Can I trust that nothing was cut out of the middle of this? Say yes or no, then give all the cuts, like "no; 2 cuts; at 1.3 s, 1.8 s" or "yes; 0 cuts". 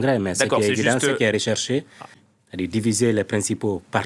no; 1 cut; at 2.1 s